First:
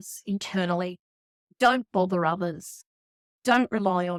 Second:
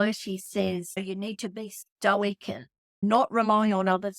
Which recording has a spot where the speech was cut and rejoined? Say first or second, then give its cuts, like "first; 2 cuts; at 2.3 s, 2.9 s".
second; 2 cuts; at 1.0 s, 3.0 s